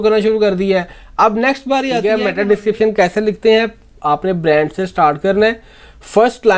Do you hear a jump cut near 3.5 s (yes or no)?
no